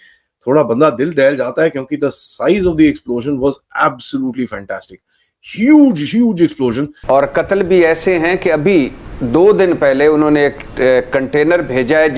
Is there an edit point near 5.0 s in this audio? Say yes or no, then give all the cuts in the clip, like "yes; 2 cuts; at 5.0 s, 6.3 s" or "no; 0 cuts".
no; 1 cut; at 6.9 s